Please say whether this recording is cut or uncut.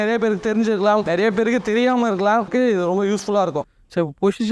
cut